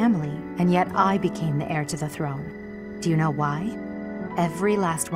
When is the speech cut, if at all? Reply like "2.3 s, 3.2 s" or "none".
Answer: none

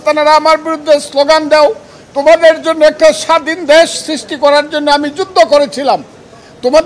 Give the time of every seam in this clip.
none

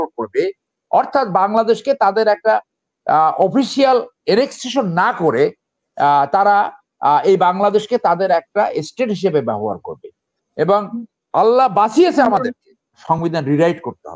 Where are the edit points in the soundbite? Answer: 13.0 s

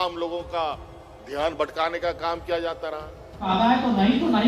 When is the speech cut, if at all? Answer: 3.5 s

